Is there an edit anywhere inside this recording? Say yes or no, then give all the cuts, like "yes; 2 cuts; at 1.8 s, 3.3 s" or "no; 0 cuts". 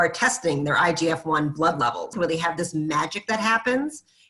yes; 1 cut; at 2.2 s